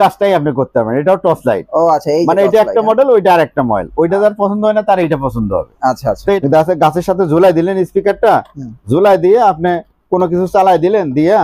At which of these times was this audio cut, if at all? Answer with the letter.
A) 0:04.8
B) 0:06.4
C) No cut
B